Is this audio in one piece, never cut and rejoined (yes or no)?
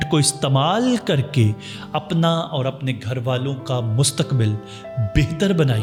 yes